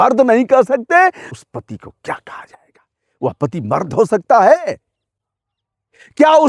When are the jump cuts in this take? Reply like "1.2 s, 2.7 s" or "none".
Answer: 1.3 s